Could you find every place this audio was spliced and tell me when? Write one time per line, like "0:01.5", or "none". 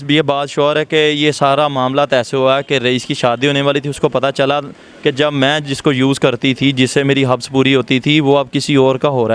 none